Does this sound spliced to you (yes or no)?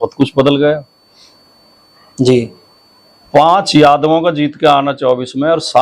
no